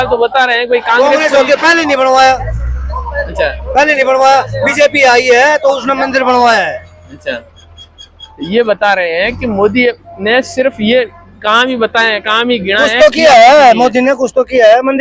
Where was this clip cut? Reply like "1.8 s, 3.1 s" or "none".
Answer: none